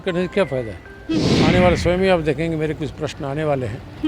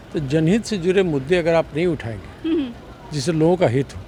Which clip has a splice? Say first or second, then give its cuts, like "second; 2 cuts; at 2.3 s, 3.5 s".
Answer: first; 1 cut; at 1.3 s